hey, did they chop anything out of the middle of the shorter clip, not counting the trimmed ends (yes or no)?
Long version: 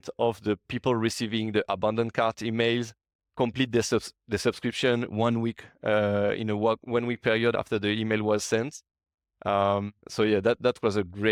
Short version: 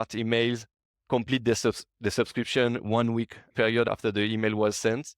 yes